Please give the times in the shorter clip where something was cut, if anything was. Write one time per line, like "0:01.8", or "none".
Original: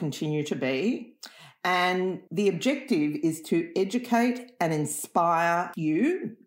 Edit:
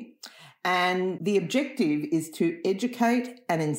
0:01.2